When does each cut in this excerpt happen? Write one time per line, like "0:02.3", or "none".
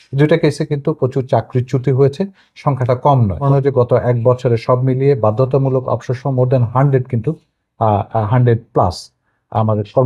0:03.4